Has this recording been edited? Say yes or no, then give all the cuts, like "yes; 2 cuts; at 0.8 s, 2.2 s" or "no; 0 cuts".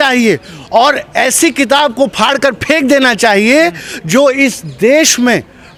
no; 0 cuts